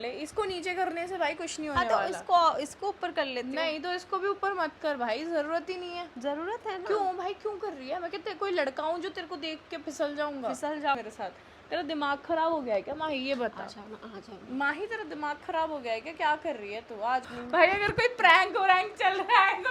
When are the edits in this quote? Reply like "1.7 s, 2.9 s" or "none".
11.0 s, 17.3 s